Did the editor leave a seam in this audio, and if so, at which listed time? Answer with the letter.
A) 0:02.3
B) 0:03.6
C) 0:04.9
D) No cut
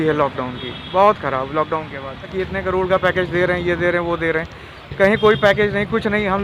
A